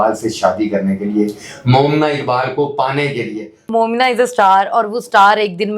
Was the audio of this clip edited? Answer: yes; 1 cut; at 3.6 s

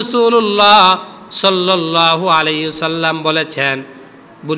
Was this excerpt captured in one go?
yes; 0 cuts

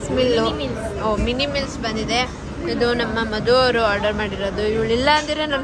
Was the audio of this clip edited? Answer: no; 0 cuts

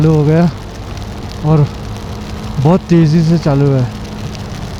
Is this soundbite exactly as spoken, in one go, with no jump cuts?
yes; 0 cuts

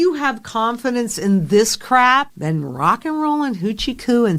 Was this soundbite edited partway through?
no; 0 cuts

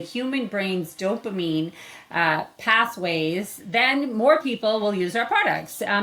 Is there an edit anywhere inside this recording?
no; 0 cuts

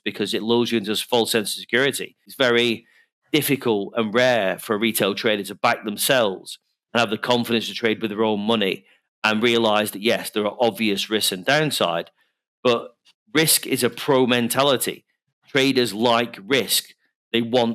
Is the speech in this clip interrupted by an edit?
yes; 1 cut; at 2.3 s

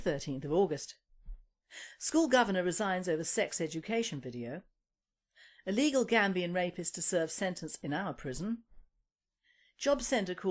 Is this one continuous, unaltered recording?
no; 1 cut; at 8.2 s

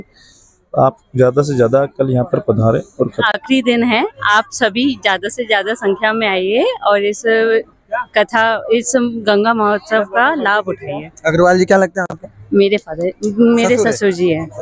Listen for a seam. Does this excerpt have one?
yes; 1 cut; at 3.2 s

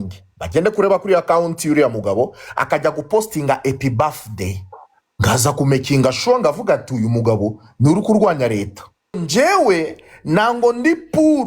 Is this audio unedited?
no; 1 cut; at 9.2 s

